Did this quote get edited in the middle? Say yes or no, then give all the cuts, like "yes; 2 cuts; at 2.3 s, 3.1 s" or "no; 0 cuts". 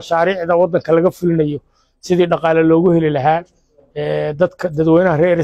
no; 0 cuts